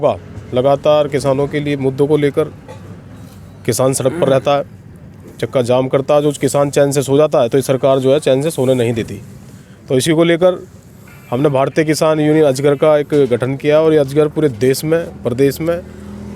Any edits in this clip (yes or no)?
no